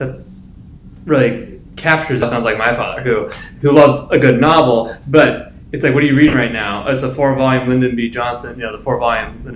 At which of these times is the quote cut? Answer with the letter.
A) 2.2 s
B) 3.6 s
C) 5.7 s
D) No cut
A